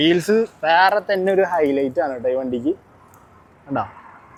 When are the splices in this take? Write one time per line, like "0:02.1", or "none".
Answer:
none